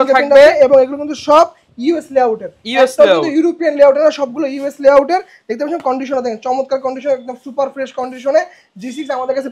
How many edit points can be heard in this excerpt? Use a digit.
0